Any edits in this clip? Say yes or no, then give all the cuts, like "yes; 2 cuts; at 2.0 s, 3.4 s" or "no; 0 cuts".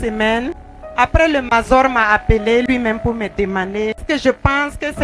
yes; 1 cut; at 4.0 s